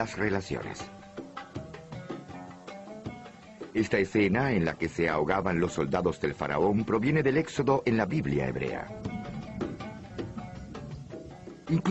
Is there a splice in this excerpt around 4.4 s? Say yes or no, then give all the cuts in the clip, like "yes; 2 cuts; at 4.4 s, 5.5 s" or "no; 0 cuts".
no; 1 cut; at 2.0 s